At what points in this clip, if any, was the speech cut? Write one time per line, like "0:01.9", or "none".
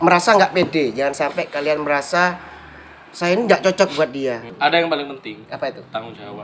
0:04.5